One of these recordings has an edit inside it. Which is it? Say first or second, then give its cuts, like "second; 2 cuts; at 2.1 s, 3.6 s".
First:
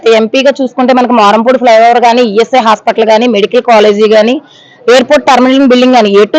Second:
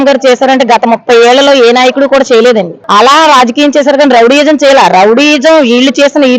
second; 1 cut; at 2.8 s